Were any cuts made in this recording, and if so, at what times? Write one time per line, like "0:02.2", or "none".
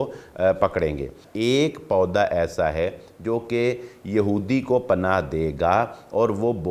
0:01.2

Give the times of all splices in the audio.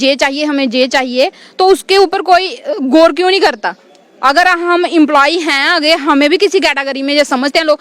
none

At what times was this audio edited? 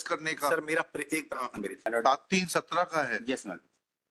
0:01.9

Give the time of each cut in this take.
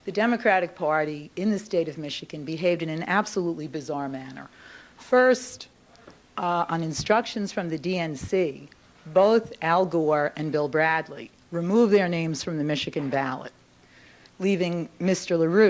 none

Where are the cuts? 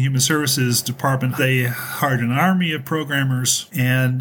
0:01.4

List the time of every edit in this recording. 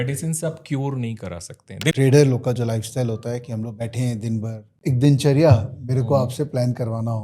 0:01.9
0:04.6

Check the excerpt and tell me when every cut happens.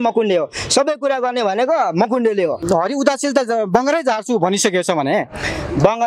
0:02.6

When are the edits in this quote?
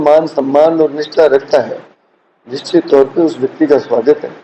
none

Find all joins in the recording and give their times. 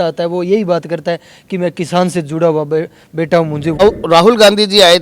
0:03.8

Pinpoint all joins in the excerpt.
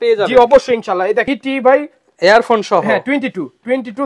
0:01.3

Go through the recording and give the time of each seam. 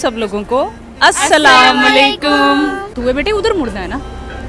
0:03.0

